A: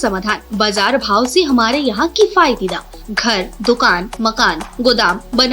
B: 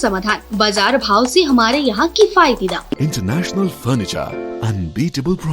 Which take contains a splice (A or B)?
B